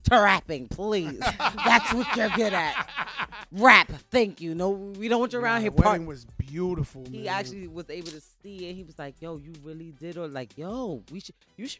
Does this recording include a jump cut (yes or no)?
yes